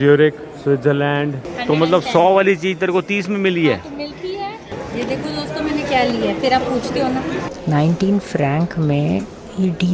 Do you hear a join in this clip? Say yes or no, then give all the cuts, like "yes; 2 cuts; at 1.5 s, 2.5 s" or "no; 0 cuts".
yes; 3 cuts; at 1.5 s, 4.8 s, 7.6 s